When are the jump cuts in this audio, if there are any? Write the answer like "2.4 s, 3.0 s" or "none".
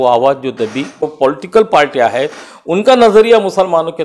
1.1 s

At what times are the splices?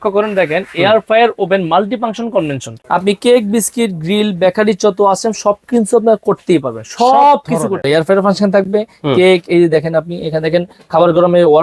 2.7 s, 7.8 s

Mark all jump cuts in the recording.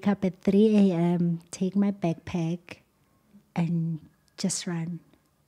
none

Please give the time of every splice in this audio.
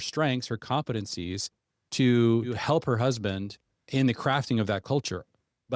2.6 s, 3.9 s

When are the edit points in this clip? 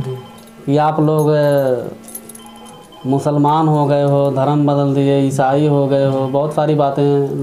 none

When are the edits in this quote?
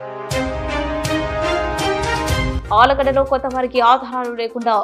2.5 s

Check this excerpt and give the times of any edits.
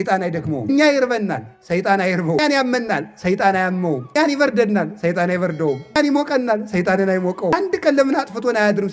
0.7 s, 2.4 s, 4.2 s, 6.0 s, 7.5 s

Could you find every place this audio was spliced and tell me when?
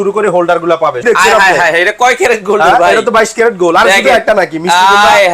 1.0 s

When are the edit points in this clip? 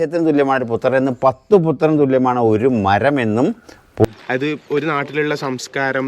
4.0 s

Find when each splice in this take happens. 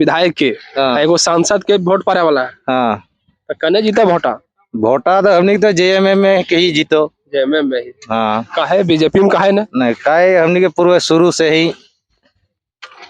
none

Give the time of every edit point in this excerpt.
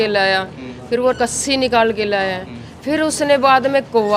1.1 s

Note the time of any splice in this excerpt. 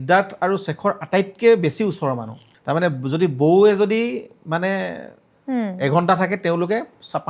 none

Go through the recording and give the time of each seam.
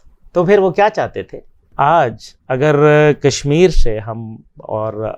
1.7 s

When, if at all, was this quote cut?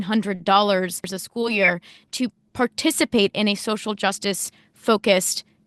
1.2 s

